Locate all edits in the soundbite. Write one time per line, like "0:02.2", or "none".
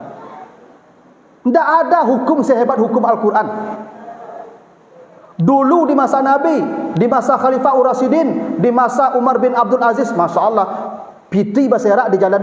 none